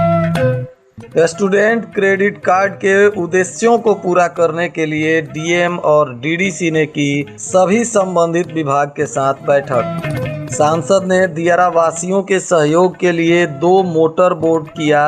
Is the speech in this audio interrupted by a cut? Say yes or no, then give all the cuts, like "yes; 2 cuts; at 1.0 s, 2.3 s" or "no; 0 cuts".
yes; 1 cut; at 0.9 s